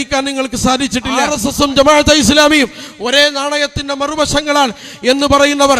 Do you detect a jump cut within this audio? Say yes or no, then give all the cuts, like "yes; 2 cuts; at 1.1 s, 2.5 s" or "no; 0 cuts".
yes; 1 cut; at 1.4 s